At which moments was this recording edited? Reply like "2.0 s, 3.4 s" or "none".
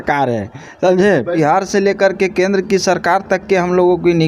1.4 s